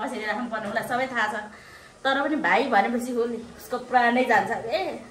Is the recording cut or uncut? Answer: uncut